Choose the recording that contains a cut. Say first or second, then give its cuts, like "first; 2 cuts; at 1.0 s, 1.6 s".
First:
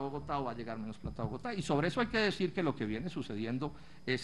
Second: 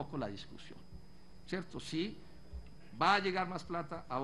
second; 1 cut; at 0.9 s